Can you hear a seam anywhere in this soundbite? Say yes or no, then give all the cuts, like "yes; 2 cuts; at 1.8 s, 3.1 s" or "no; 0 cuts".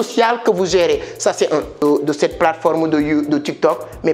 yes; 1 cut; at 1.8 s